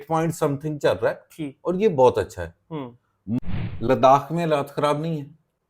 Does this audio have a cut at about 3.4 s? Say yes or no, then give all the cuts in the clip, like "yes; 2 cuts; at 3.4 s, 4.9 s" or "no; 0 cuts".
yes; 1 cut; at 3.4 s